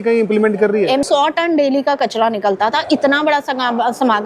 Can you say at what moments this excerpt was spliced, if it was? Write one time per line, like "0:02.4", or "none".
0:01.0